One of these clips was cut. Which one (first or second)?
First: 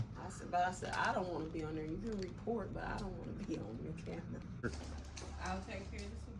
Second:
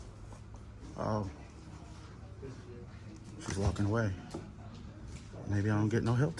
first